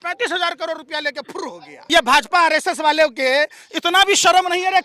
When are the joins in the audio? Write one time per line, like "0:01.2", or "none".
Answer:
0:01.7